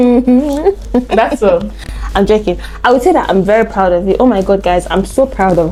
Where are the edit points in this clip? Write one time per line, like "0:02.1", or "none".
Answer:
none